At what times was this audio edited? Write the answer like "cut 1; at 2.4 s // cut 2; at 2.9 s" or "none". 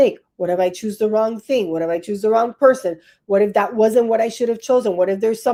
none